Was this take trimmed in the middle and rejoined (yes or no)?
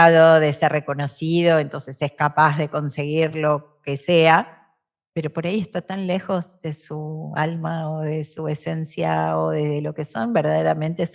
no